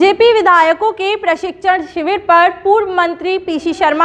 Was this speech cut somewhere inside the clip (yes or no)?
no